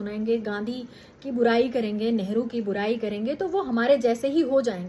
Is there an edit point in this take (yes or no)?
no